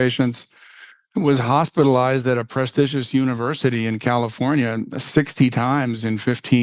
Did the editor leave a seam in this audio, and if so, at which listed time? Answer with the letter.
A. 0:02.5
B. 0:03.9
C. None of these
C